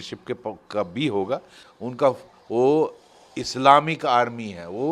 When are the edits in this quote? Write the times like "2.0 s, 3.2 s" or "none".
1.6 s